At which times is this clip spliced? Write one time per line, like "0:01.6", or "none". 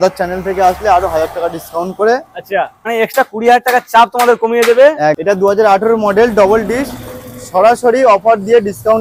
0:02.8
0:05.2